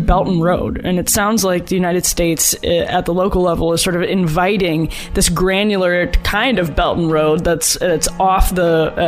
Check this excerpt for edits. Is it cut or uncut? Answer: uncut